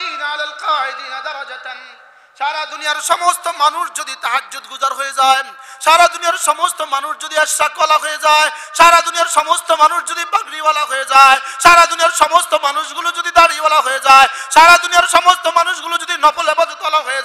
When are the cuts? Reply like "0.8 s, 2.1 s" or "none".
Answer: none